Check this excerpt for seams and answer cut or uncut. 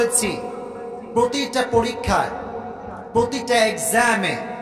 uncut